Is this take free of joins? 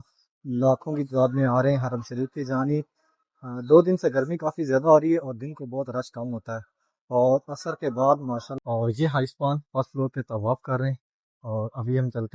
no; 1 cut; at 8.6 s

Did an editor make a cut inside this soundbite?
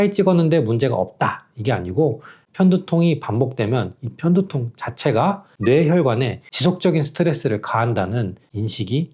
no; 0 cuts

